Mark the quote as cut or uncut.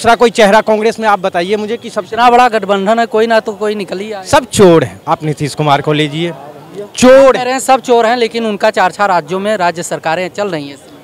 uncut